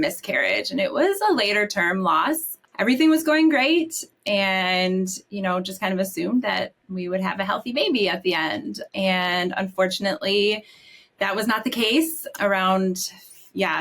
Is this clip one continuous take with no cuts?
no; 3 cuts; at 2.6 s, 8.8 s, 12.2 s

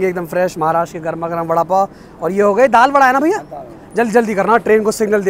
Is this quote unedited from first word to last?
yes; 0 cuts

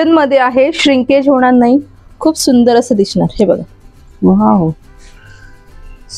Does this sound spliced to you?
no; 0 cuts

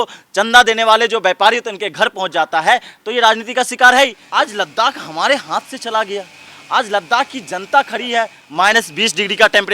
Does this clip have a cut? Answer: yes; 2 cuts; at 4.2 s, 8.4 s

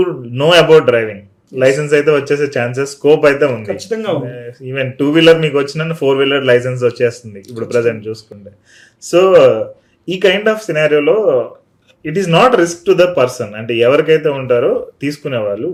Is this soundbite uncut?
yes; 0 cuts

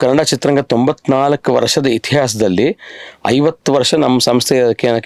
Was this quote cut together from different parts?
no; 0 cuts

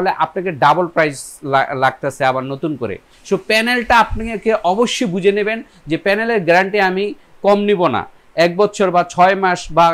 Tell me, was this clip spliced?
no; 0 cuts

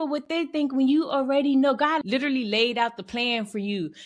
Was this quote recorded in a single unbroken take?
no; 1 cut; at 2.0 s

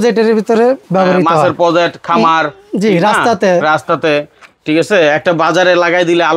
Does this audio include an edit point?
no; 0 cuts

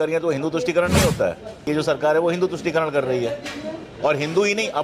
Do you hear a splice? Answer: yes; 1 cut; at 1.6 s

